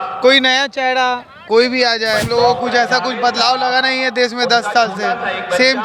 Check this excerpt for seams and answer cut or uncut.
cut